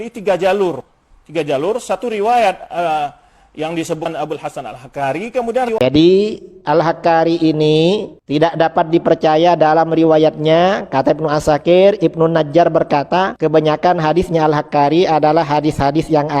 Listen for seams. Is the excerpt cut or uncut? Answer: cut